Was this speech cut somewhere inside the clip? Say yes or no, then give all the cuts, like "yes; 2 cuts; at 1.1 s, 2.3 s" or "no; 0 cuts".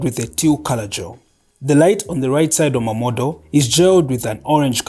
no; 0 cuts